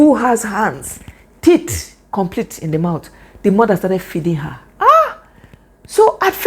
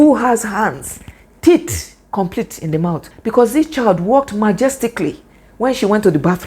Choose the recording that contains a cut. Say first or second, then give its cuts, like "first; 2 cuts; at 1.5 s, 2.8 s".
second; 1 cut; at 3.1 s